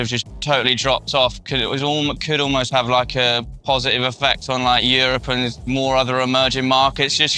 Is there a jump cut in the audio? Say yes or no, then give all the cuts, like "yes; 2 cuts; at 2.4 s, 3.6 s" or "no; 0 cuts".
no; 0 cuts